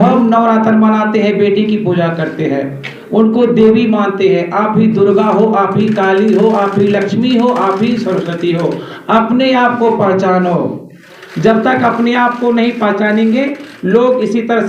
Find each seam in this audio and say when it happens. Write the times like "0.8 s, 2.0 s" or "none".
none